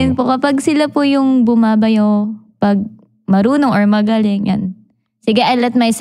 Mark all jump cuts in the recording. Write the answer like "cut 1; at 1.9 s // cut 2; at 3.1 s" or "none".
none